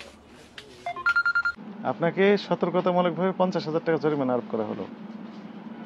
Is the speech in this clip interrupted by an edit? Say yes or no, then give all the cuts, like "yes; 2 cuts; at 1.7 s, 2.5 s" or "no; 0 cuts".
yes; 1 cut; at 1.6 s